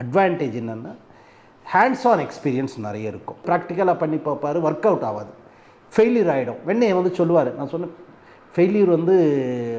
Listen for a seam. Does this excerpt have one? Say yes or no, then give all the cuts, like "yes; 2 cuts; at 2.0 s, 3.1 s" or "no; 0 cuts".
yes; 1 cut; at 3.4 s